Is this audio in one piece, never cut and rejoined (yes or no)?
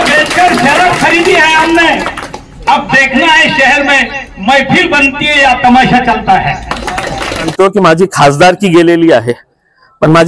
no